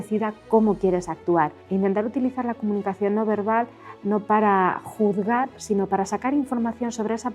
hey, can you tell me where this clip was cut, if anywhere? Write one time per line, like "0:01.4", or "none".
0:01.6